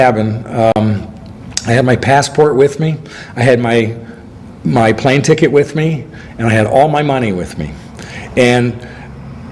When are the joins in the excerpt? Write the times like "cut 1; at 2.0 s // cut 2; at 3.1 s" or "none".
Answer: none